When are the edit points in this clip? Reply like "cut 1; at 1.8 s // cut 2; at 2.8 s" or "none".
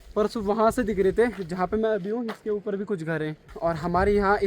cut 1; at 3.5 s